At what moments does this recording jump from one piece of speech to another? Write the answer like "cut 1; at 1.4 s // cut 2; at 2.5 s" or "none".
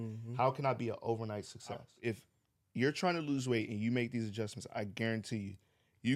cut 1; at 1.9 s